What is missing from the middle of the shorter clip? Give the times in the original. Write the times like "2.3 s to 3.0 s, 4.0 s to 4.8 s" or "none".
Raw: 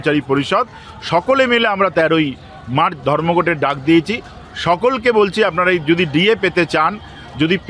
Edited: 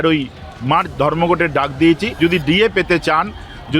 4.2 s to 5.8 s